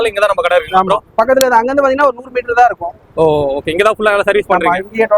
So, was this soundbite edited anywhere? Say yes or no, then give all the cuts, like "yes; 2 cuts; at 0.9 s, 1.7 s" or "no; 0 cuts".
no; 0 cuts